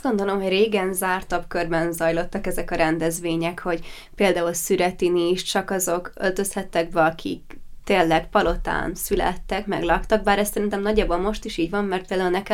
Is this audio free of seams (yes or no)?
no